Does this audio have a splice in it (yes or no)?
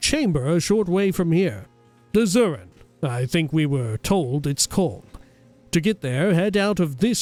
no